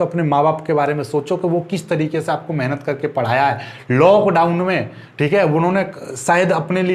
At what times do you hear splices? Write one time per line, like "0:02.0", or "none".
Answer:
none